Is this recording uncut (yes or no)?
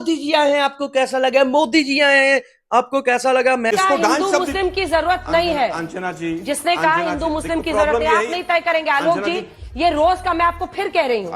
no